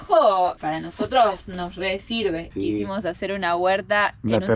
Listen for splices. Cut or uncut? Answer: cut